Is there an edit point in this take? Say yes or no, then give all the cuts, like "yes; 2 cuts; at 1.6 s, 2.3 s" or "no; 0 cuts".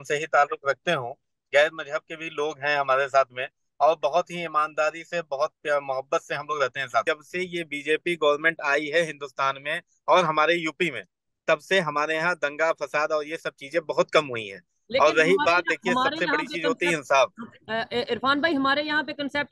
yes; 1 cut; at 7.0 s